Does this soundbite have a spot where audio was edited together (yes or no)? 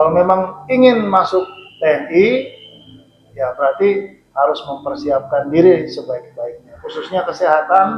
no